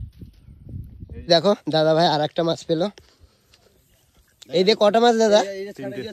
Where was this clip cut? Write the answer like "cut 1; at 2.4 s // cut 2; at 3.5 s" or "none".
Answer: cut 1; at 1.3 s